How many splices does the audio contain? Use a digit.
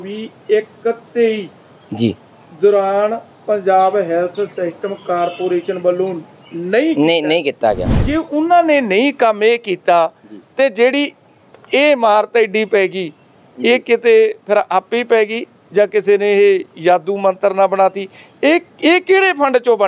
0